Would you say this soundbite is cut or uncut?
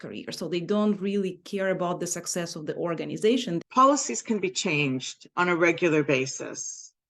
cut